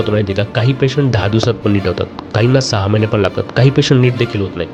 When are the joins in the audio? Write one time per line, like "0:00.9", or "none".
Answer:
none